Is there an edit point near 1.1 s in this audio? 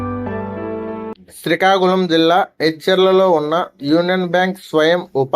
yes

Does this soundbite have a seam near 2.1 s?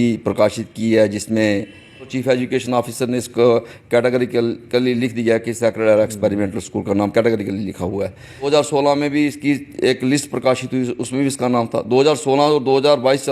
yes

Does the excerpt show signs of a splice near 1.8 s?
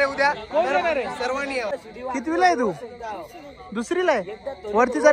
yes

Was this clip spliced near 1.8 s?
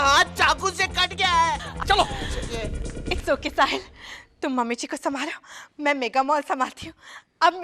yes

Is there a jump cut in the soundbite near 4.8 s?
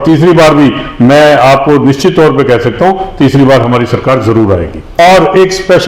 yes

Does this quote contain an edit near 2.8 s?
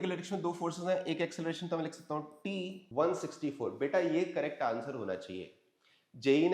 yes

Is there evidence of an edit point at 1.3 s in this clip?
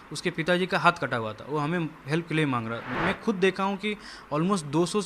no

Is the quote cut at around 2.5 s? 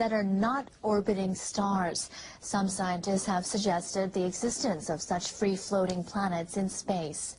no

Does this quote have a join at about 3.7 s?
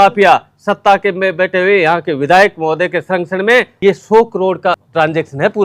yes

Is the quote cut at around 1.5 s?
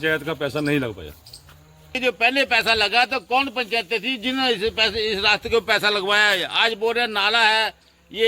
yes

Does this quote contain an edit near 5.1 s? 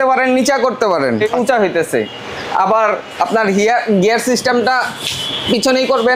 no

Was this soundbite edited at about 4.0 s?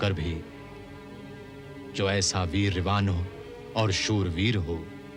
no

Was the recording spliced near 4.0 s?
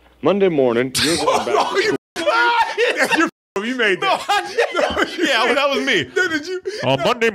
no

